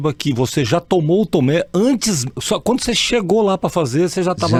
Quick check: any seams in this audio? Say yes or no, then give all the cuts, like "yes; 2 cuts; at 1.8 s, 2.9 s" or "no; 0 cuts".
no; 0 cuts